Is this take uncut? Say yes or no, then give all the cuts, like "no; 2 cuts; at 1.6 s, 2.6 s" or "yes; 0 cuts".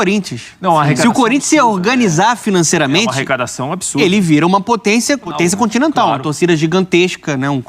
no; 1 cut; at 5.3 s